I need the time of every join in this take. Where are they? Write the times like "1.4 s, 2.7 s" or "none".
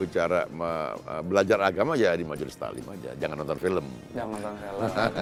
none